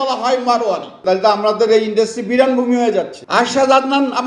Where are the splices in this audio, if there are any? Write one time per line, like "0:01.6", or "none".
0:01.0
0:03.2